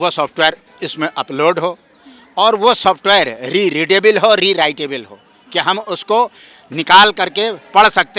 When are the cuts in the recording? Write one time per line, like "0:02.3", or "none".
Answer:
none